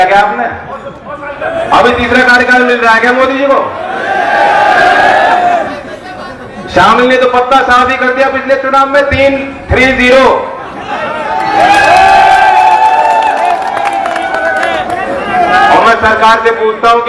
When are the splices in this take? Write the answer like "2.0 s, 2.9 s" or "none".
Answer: none